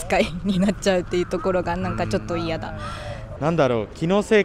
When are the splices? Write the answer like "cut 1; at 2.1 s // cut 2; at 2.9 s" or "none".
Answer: cut 1; at 2.8 s